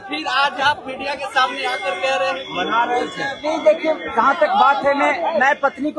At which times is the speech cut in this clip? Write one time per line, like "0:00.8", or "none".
none

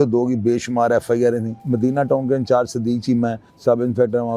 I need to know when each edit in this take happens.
0:01.6
0:03.5

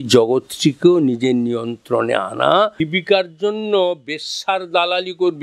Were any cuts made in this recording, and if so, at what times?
0:02.8

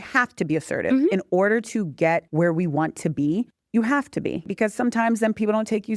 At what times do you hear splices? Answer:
0:02.3
0:03.6
0:04.5

